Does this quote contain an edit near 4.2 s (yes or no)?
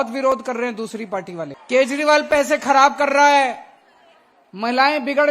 no